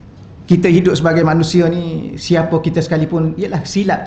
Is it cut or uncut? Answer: uncut